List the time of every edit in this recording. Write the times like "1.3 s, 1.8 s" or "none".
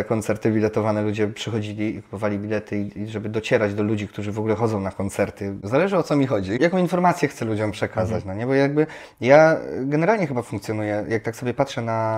5.6 s, 6.6 s